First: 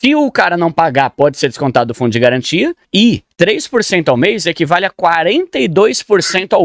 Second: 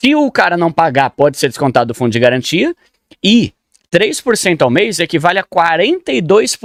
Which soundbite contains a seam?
first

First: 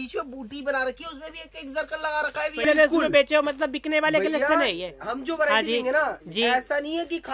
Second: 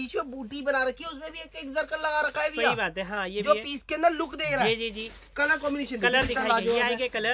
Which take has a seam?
first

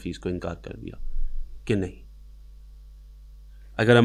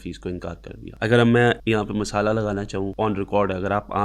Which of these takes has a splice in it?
second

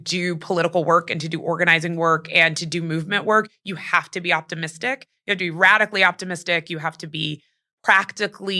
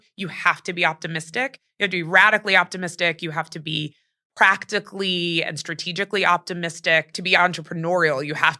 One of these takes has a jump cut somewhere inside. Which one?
second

